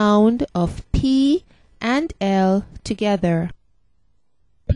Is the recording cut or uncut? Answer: uncut